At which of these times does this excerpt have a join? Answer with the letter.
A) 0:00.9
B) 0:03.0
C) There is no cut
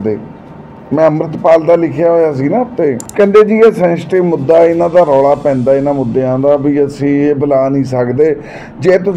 B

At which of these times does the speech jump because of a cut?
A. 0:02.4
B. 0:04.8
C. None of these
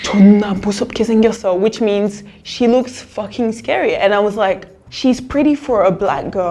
B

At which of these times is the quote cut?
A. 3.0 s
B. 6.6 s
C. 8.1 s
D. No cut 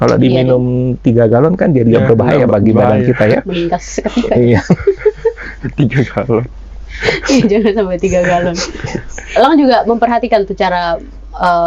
D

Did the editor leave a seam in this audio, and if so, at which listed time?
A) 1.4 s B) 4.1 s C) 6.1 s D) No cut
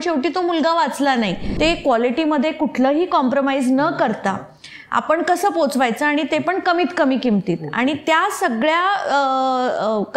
A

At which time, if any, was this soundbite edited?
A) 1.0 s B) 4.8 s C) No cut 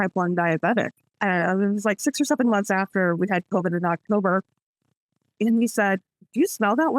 A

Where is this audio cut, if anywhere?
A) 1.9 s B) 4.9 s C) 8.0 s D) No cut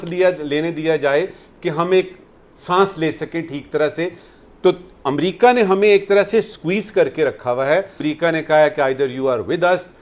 C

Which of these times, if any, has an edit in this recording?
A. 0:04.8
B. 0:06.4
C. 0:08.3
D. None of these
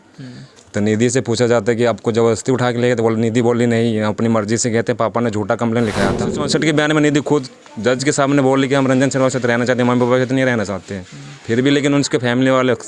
B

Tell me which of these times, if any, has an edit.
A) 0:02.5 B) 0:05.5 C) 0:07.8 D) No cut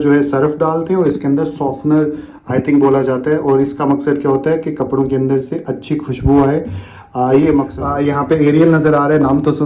C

